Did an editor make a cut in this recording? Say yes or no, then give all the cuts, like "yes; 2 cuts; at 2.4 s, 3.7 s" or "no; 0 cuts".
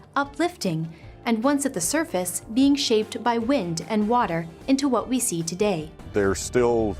yes; 1 cut; at 6.0 s